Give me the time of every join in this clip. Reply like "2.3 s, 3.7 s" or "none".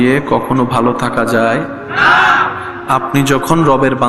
none